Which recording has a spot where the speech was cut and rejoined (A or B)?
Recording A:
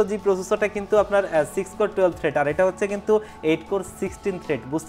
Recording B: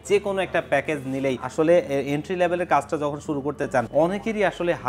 B